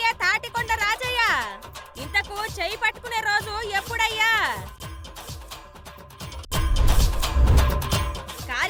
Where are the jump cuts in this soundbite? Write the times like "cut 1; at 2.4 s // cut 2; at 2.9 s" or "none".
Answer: none